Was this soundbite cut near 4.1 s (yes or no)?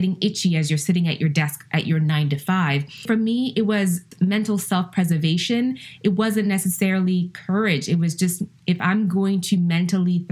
yes